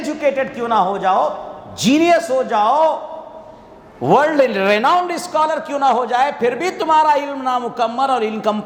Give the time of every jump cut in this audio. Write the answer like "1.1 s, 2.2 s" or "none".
none